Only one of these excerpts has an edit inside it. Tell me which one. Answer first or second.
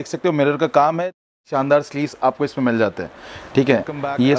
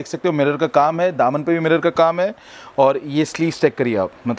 first